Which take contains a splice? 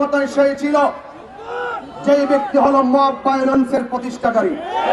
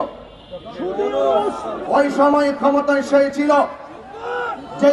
second; 1 cut; at 1.8 s

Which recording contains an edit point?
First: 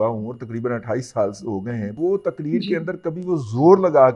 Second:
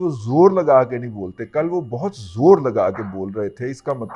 first; 1 cut; at 1.9 s

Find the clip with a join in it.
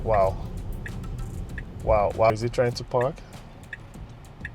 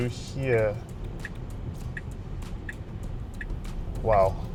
first; 1 cut; at 2.3 s

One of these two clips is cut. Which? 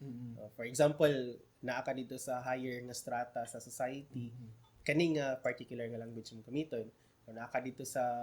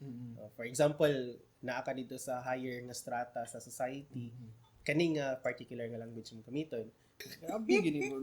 second; 1 cut; at 7.3 s

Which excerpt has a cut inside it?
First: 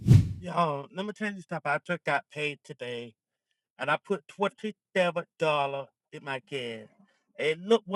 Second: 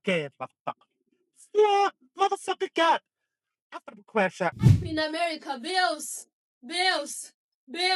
second; 1 cut; at 4.6 s

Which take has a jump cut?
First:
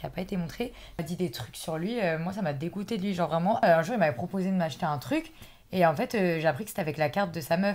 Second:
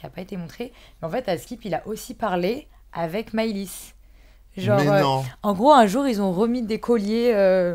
first; 2 cuts; at 1.0 s, 3.6 s

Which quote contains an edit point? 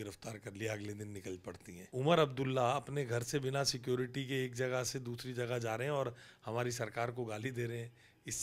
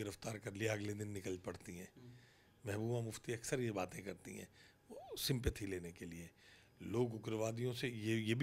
first; 1 cut; at 1.7 s

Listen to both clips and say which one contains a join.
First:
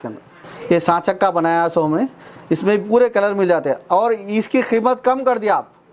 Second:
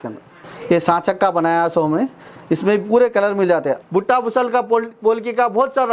second; 1 cut; at 3.8 s

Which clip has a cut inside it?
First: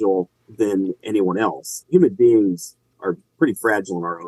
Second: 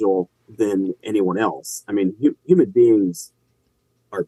first; 2 cuts; at 1.8 s, 2.9 s

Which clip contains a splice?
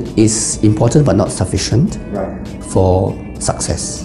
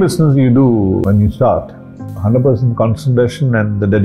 second; 2 cuts; at 1.0 s, 2.1 s

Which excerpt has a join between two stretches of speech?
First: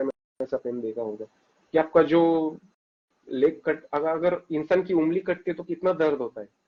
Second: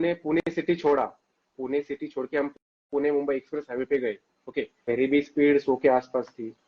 second; 1 cut; at 4.9 s

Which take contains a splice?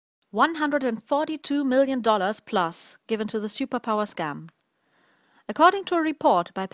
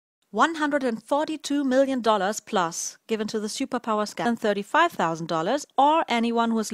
first; 1 cut; at 4.2 s

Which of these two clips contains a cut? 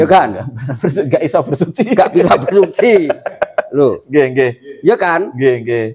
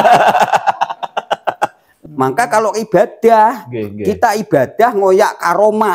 second; 1 cut; at 1.9 s

